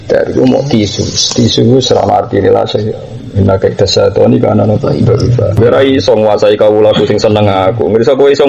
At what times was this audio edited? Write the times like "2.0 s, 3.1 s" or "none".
5.6 s